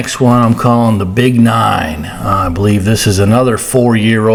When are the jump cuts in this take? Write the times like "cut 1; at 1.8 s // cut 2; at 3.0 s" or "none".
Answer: none